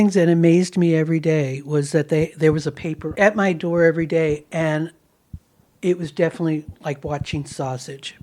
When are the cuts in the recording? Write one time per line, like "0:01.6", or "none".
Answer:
0:03.0